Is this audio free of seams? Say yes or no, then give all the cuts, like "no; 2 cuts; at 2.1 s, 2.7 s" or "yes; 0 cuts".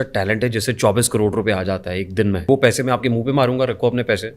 no; 1 cut; at 2.5 s